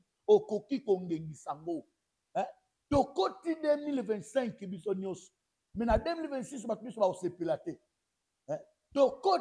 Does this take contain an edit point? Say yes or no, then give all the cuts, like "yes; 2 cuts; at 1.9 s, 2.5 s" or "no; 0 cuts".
no; 0 cuts